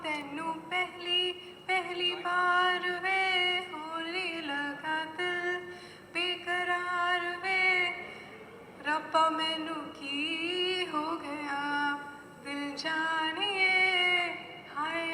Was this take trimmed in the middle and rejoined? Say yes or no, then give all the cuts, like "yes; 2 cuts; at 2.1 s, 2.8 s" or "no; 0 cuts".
no; 0 cuts